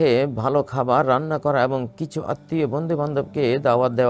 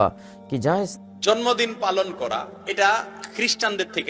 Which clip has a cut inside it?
second; 1 cut; at 0.9 s

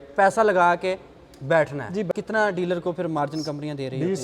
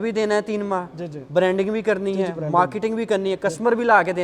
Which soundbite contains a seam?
first; 1 cut; at 2.1 s

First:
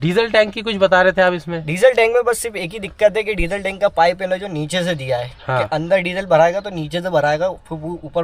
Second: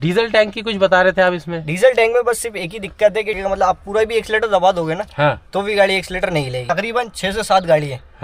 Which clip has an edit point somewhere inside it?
second; 2 cuts; at 3.3 s, 6.6 s

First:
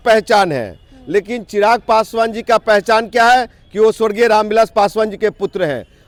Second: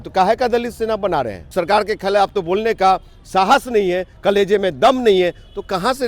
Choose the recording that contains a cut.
second; 1 cut; at 1.4 s

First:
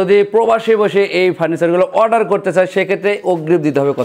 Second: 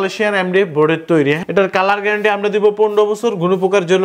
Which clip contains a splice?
second; 1 cut; at 1.4 s

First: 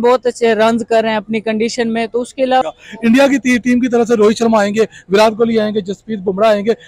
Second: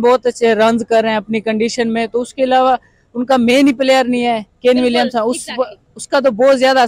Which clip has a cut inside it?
first; 1 cut; at 2.6 s

